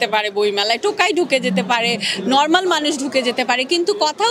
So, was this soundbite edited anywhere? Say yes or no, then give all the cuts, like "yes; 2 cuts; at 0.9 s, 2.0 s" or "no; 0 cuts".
no; 0 cuts